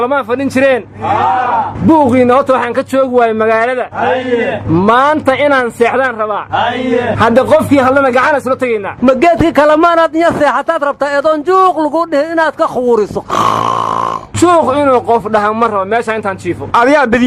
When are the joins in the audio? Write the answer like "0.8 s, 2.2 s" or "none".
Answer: none